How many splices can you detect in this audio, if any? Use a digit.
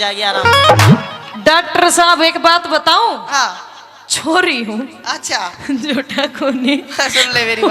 0